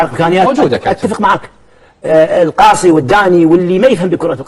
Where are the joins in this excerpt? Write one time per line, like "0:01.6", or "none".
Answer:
none